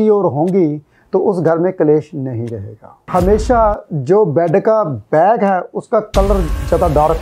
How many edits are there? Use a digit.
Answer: 1